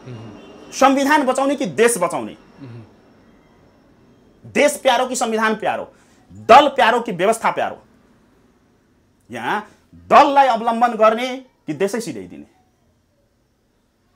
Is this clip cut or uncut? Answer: uncut